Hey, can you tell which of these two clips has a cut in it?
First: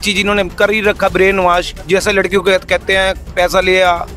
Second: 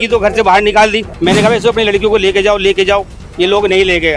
second; 1 cut; at 1.1 s

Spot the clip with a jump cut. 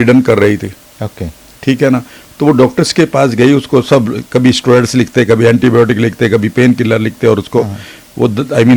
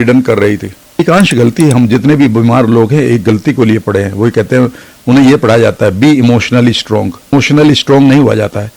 second; 2 cuts; at 1.0 s, 7.3 s

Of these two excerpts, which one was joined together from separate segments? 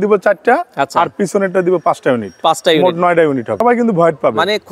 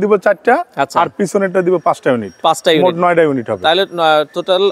first; 1 cut; at 3.6 s

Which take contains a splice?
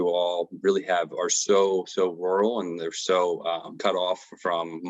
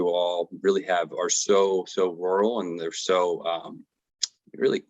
first; 1 cut; at 3.8 s

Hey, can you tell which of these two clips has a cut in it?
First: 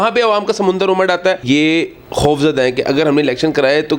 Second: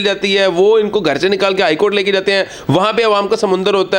first; 1 cut; at 1.4 s

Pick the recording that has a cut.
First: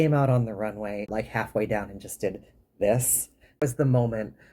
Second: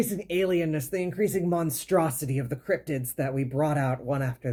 first; 2 cuts; at 1.1 s, 3.6 s

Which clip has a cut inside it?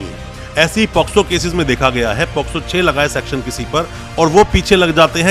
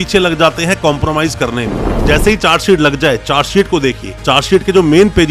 second; 1 cut; at 1.8 s

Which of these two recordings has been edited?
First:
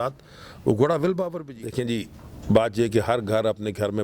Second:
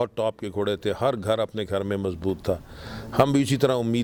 first; 1 cut; at 1.4 s

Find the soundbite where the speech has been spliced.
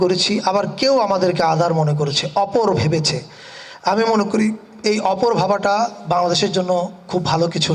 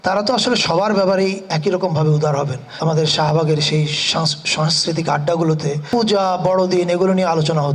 second; 2 cuts; at 2.8 s, 5.8 s

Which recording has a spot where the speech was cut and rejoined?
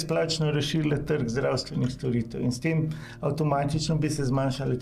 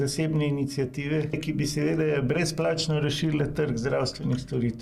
second; 1 cut; at 1.4 s

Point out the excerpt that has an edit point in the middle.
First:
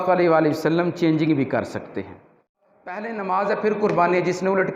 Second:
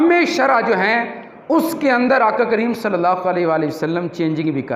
first; 1 cut; at 2.6 s

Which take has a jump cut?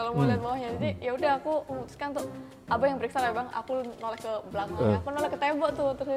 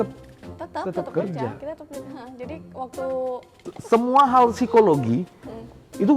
second; 1 cut; at 3.7 s

